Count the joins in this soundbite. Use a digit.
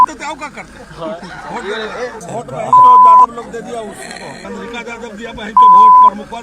0